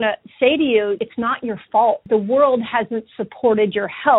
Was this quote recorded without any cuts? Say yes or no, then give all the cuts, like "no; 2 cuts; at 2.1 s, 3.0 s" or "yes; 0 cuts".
no; 2 cuts; at 1.0 s, 2.0 s